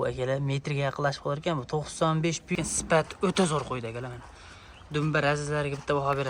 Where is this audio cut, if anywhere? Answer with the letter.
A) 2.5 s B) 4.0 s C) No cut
A